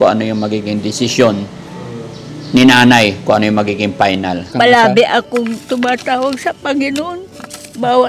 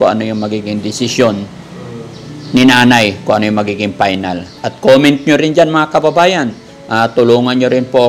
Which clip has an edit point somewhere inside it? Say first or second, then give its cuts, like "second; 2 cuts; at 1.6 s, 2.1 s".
first; 1 cut; at 4.5 s